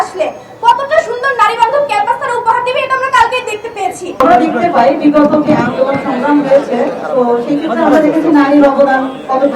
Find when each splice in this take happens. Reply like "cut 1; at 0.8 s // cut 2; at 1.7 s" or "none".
cut 1; at 4.2 s